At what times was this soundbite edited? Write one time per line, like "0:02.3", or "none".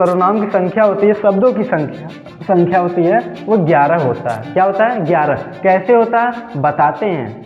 none